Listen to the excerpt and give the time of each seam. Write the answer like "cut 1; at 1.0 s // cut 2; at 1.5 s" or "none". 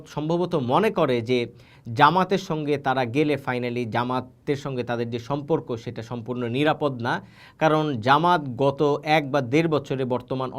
none